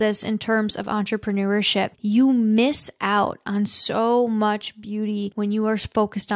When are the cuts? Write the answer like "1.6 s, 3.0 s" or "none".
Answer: 1.9 s, 5.3 s